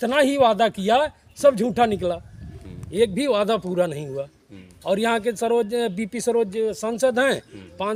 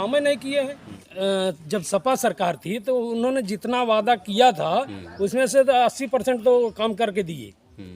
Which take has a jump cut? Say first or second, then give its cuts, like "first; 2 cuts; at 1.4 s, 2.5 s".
second; 1 cut; at 1.0 s